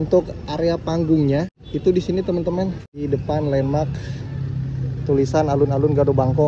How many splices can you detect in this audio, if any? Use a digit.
2